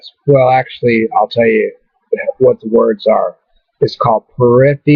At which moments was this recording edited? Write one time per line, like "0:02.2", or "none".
0:01.4